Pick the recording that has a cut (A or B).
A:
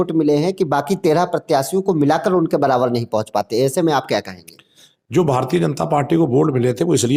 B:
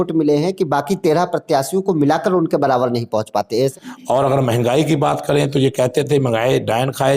B